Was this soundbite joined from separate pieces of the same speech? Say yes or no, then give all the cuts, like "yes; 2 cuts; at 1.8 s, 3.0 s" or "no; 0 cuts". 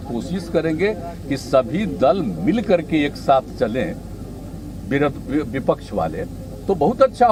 no; 0 cuts